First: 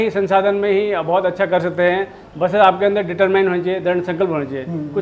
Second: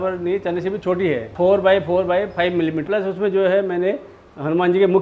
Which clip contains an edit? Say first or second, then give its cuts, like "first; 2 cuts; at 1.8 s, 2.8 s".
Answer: second; 2 cuts; at 1.3 s, 2.8 s